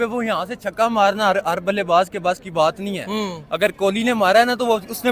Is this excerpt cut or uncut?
uncut